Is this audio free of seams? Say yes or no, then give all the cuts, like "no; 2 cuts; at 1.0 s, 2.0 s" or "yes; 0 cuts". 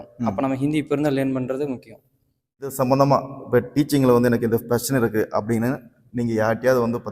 no; 1 cut; at 2.7 s